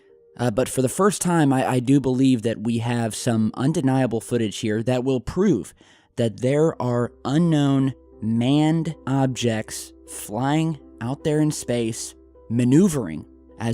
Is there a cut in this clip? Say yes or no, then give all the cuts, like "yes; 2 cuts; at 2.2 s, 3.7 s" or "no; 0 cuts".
yes; 1 cut; at 4.5 s